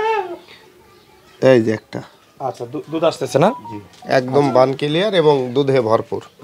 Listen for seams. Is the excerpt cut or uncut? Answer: uncut